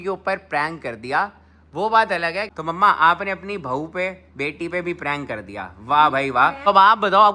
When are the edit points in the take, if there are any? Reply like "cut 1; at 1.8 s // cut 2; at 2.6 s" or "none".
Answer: cut 1; at 2.5 s // cut 2; at 6.6 s